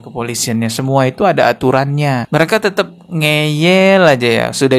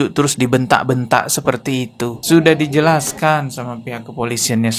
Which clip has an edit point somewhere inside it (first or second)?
second